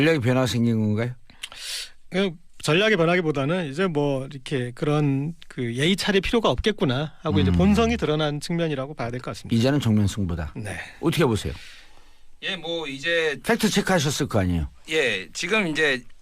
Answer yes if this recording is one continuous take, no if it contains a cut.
yes